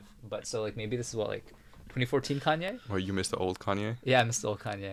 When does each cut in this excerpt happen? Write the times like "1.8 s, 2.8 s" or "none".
none